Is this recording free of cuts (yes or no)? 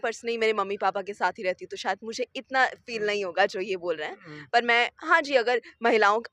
yes